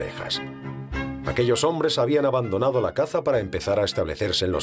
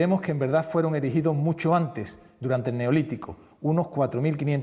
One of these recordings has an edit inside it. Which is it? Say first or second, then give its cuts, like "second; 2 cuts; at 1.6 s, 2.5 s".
first; 1 cut; at 1.0 s